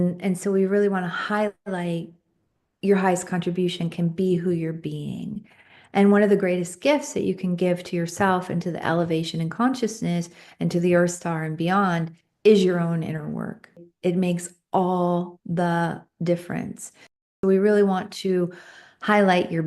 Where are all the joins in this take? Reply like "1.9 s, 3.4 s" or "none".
13.9 s, 17.1 s